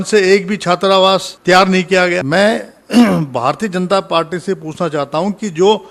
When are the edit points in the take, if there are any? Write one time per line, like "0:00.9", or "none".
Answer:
0:01.3
0:02.2